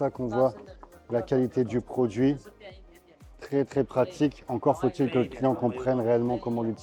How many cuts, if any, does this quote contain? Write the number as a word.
zero